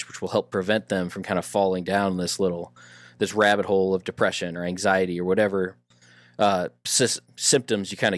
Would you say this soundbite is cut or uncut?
uncut